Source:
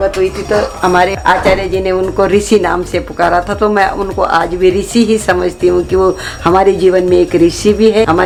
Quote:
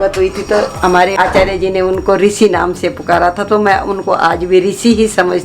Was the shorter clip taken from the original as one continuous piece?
no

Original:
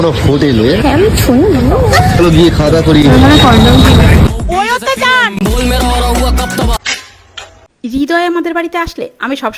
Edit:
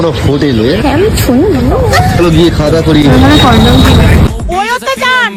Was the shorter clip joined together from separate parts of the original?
no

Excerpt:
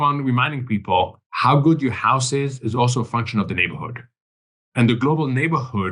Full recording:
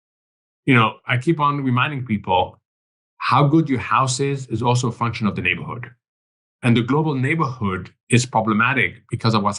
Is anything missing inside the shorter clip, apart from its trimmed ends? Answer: yes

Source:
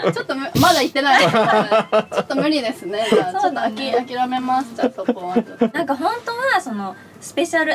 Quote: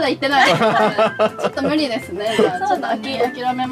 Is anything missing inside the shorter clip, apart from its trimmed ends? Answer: no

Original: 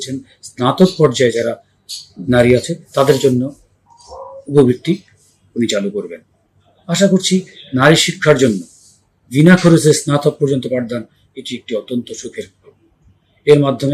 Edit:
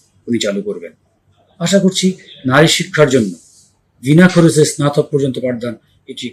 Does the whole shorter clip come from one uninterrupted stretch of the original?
yes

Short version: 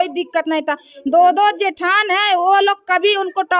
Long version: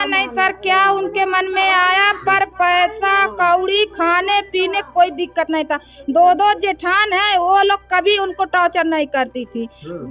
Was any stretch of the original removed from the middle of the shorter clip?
no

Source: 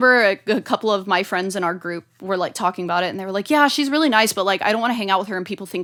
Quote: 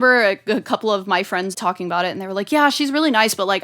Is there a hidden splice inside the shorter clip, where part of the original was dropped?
yes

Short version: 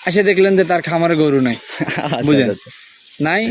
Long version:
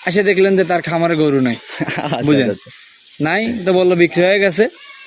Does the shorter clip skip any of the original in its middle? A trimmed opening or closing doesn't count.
no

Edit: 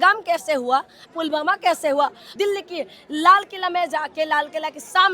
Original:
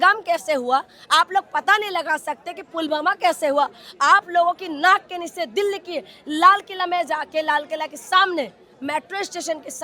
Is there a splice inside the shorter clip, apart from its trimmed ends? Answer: yes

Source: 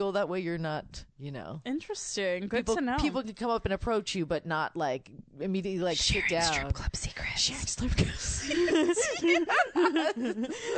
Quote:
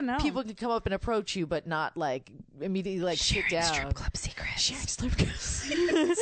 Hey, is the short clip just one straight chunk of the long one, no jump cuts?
yes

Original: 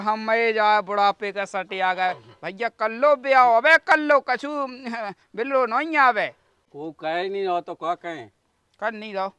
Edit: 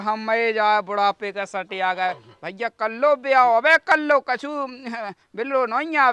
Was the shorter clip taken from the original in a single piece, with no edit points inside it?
yes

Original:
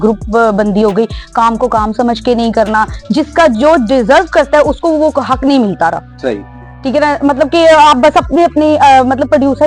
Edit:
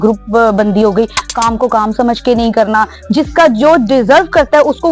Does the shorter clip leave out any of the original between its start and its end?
no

